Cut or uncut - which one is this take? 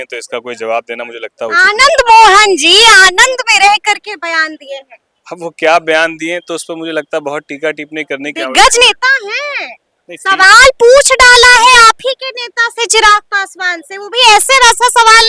uncut